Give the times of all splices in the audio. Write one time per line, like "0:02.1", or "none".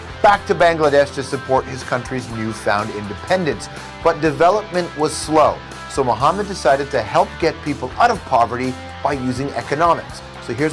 none